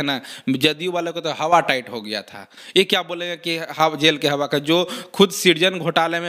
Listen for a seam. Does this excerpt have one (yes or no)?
no